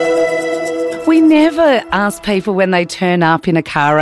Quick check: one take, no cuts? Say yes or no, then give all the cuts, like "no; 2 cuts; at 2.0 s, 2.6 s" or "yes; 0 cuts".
no; 1 cut; at 1.0 s